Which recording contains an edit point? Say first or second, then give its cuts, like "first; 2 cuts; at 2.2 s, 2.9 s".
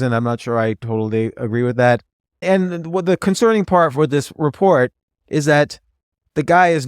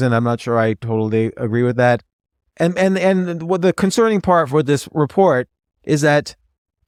first; 1 cut; at 2.4 s